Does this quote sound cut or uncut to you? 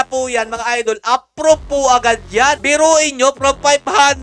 cut